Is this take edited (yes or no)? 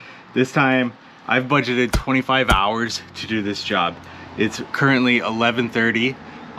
yes